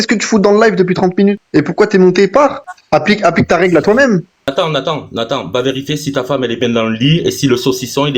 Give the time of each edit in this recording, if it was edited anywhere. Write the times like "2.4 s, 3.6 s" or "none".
1.4 s, 2.7 s, 4.5 s